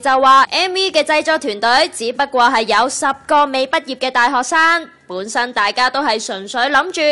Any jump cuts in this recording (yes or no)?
yes